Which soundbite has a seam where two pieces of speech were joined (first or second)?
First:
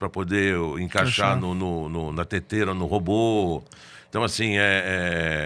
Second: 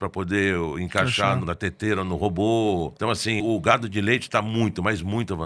second